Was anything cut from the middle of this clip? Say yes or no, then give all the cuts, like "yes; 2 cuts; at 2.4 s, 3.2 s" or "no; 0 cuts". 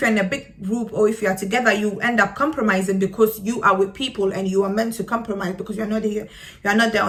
no; 0 cuts